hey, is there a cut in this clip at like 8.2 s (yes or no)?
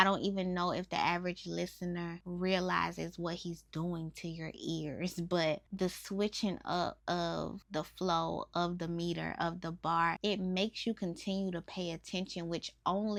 no